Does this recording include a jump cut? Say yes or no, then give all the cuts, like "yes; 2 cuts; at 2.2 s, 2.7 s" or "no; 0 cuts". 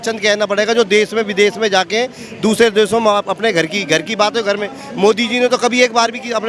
no; 0 cuts